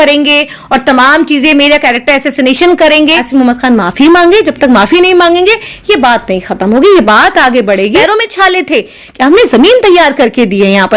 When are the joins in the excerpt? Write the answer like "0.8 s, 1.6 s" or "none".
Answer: 3.1 s, 7.8 s